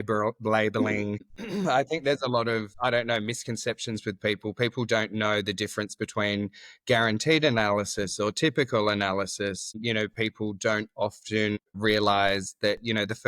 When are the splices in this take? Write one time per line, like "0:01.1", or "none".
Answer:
0:01.4
0:02.7
0:09.8
0:11.7